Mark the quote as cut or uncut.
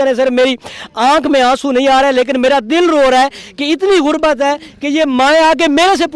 uncut